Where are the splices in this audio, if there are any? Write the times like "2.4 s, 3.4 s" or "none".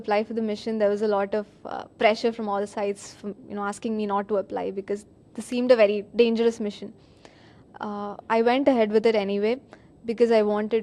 4.8 s